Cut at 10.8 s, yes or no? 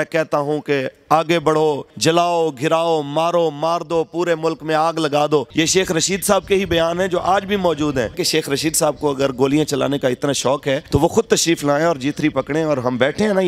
yes